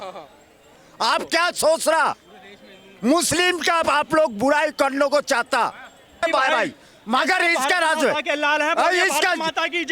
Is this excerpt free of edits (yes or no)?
no